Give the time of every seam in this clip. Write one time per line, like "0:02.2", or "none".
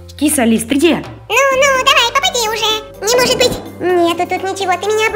0:01.2
0:02.8
0:03.7